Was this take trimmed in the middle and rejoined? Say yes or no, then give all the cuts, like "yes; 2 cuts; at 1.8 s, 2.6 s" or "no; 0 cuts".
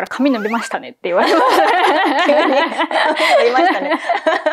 no; 0 cuts